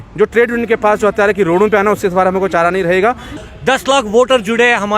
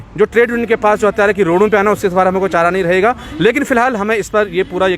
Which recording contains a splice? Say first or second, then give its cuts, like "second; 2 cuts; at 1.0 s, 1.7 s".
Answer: first; 1 cut; at 3.3 s